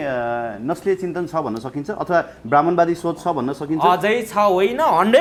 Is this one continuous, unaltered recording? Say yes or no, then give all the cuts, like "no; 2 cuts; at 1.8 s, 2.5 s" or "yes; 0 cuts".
yes; 0 cuts